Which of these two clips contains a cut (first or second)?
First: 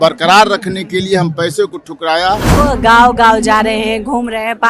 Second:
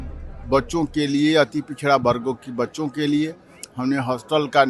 first